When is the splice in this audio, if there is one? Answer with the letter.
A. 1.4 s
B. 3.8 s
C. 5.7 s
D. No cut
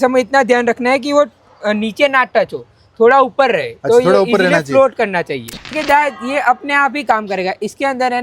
C